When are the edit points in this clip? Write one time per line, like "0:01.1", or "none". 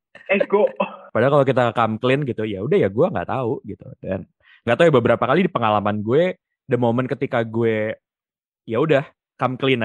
0:01.0